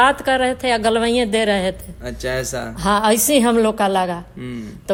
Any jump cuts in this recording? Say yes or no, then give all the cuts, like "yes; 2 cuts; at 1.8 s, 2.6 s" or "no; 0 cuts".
no; 0 cuts